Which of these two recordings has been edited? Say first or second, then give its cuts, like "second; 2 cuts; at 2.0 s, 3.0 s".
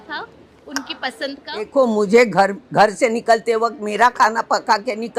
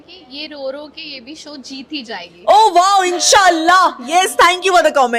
first; 1 cut; at 1.7 s